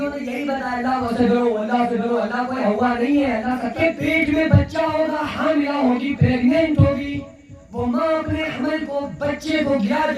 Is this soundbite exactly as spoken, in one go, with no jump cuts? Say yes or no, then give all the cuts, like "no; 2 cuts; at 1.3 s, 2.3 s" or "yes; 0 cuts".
no; 1 cut; at 3.8 s